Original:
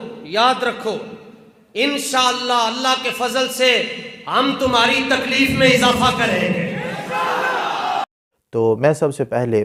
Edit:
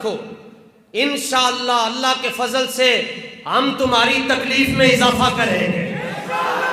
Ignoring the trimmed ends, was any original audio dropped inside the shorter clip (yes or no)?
no